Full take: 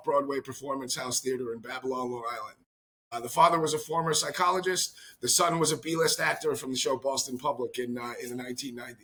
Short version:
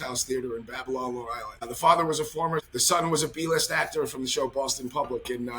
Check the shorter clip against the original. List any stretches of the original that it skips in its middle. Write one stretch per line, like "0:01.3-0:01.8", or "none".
0:02.5-0:03.1
0:04.2-0:05.2